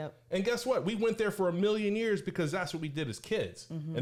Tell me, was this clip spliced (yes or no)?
no